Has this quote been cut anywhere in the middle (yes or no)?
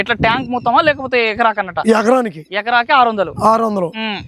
no